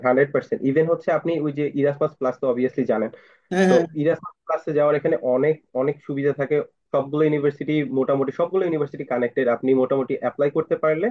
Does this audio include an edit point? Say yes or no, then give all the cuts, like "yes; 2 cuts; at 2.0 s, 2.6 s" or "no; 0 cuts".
no; 0 cuts